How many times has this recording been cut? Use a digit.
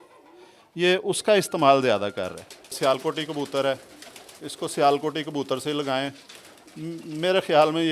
1